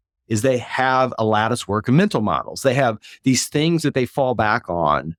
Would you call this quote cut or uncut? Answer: uncut